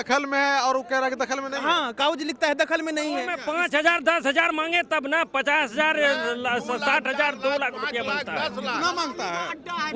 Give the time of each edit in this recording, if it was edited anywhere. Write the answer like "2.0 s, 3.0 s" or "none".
3.4 s